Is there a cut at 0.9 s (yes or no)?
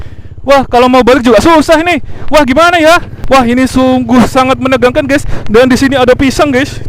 no